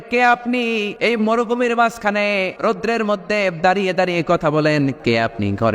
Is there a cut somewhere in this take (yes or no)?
yes